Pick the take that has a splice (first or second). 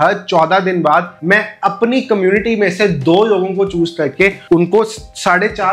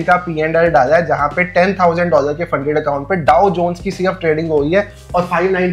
first